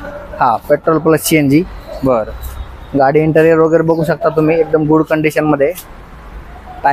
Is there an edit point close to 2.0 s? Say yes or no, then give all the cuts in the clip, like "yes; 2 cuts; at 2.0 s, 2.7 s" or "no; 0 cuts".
no; 0 cuts